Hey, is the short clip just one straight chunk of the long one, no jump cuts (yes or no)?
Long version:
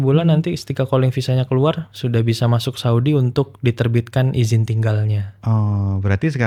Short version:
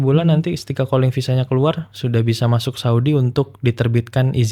yes